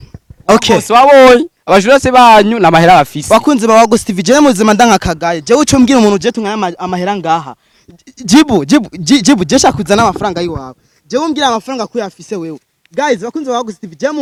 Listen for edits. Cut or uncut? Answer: uncut